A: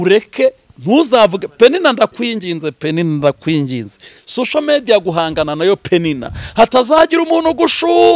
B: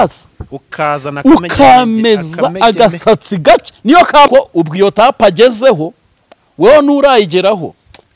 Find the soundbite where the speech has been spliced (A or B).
B